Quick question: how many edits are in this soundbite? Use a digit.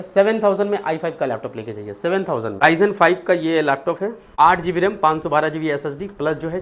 2